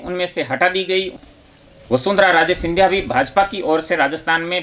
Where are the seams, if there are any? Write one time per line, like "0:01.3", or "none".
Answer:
0:01.1